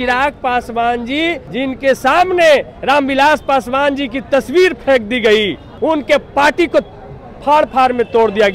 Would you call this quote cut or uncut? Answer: cut